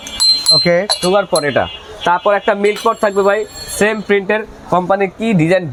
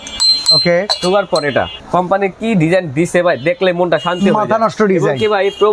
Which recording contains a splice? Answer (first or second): second